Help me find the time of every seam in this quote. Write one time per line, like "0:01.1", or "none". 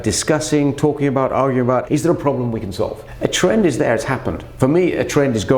0:01.8
0:03.0
0:04.4